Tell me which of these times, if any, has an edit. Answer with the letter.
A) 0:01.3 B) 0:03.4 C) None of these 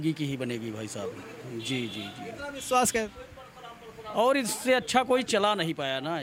C